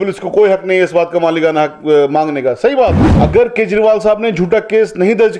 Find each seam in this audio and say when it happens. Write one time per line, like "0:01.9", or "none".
0:03.1